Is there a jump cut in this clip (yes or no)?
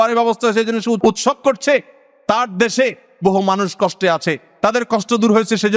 yes